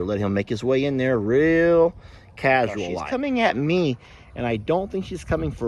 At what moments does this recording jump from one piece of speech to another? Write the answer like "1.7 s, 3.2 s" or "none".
2.9 s